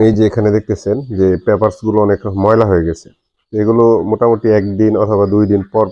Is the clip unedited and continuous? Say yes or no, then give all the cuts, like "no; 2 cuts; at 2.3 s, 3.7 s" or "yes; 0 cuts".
yes; 0 cuts